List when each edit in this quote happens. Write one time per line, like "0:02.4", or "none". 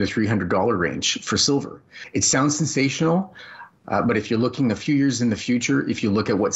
0:01.9

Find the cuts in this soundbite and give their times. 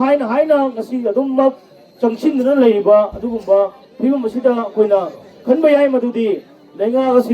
none

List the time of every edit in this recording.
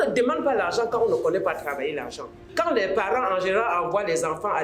0:02.4

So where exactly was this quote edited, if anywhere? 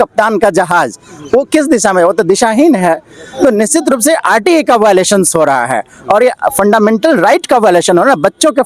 none

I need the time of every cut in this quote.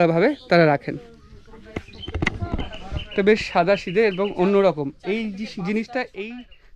none

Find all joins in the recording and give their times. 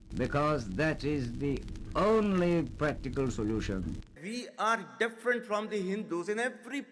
0:04.1

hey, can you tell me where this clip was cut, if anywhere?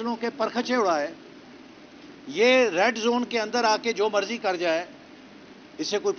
none

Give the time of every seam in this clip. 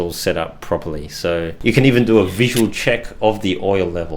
0:01.5

